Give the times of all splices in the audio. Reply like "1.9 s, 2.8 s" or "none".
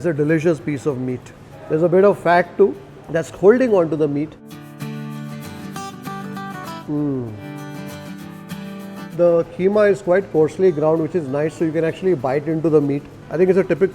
9.0 s